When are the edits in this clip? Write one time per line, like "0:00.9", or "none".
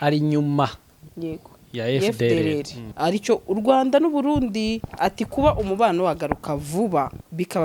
0:02.8